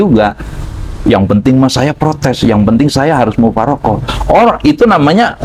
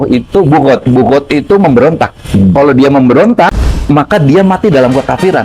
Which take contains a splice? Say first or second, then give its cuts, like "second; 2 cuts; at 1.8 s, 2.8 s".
second; 1 cut; at 3.6 s